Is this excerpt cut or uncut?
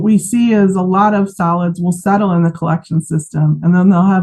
uncut